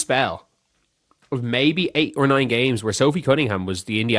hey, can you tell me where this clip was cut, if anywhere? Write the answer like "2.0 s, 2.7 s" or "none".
2.3 s